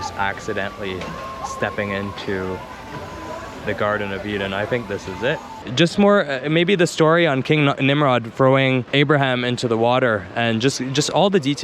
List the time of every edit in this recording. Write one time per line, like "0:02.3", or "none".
0:05.6